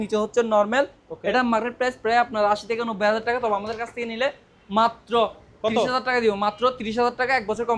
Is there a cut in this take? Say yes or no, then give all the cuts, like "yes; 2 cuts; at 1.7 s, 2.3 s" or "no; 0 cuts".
no; 0 cuts